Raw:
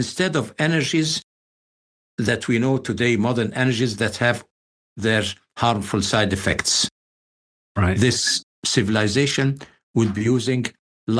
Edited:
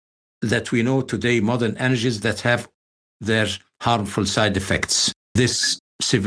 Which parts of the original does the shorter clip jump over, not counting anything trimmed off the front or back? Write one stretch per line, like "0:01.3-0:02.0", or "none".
0:07.1-0:08.0